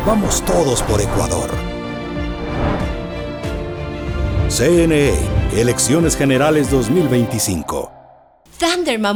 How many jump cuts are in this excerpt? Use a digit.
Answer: 0